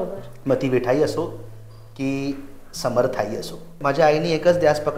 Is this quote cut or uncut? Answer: cut